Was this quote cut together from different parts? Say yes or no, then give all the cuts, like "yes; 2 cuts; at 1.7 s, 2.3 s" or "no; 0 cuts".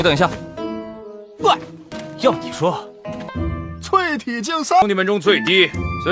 yes; 1 cut; at 3.3 s